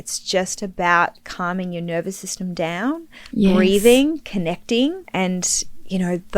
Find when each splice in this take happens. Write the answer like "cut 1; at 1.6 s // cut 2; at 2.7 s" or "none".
cut 1; at 5.0 s